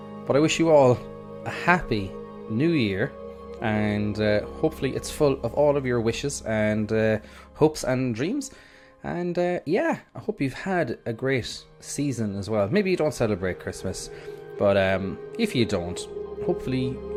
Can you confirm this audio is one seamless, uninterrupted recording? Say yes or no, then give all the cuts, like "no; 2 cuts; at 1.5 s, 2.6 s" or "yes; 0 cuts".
yes; 0 cuts